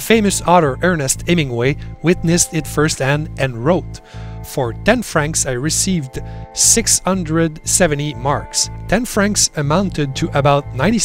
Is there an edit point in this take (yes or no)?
no